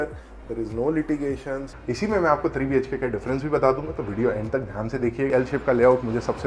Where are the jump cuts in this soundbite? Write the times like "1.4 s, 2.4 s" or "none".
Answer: 1.7 s, 5.3 s